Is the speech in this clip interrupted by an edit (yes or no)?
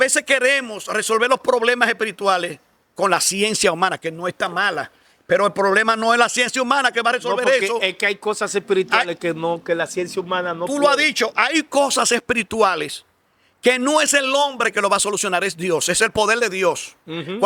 no